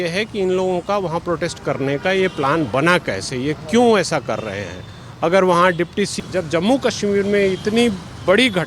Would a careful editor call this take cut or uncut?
cut